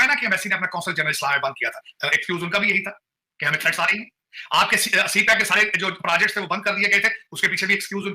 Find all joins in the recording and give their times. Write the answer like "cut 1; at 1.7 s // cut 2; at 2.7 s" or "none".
none